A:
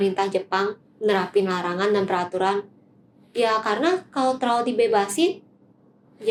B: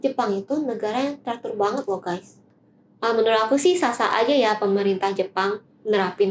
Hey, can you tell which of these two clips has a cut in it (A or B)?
B